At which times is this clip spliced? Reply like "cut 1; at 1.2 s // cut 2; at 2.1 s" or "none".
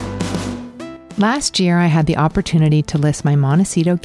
cut 1; at 1.0 s